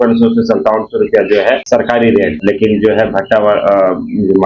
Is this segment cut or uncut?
cut